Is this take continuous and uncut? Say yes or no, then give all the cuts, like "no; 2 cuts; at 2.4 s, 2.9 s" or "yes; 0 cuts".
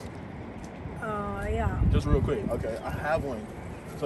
yes; 0 cuts